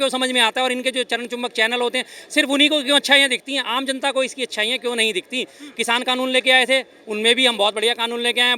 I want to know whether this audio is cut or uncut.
uncut